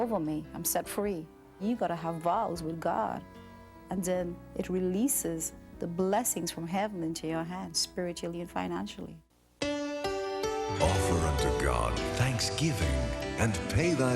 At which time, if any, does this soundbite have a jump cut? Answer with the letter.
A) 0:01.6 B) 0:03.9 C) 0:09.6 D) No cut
A